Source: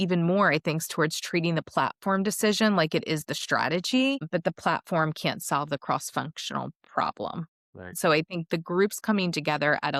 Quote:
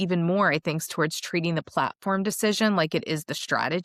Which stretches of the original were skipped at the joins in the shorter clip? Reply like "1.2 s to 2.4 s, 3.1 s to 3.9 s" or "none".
none